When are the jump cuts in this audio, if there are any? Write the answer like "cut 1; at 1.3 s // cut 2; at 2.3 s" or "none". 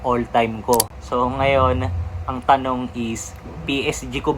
cut 1; at 1.0 s